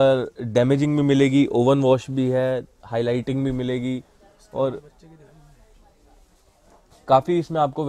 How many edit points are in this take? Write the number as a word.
zero